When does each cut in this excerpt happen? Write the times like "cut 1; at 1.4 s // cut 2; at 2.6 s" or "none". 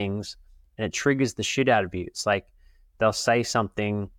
none